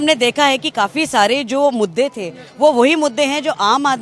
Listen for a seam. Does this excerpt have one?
no; 0 cuts

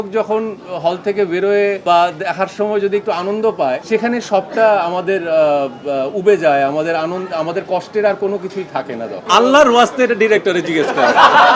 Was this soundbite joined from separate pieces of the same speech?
no; 0 cuts

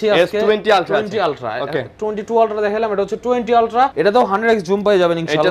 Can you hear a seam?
yes; 1 cut; at 3.9 s

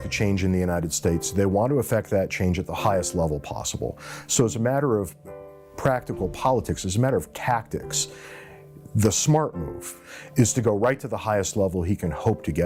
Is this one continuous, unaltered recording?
yes; 0 cuts

